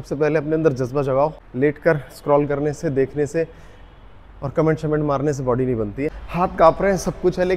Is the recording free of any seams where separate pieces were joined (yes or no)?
no